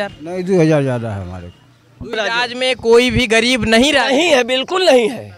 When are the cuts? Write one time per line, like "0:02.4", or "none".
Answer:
0:02.1